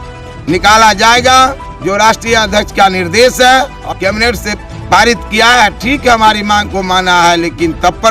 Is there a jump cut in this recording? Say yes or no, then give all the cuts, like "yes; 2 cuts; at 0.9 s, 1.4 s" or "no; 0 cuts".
yes; 1 cut; at 3.8 s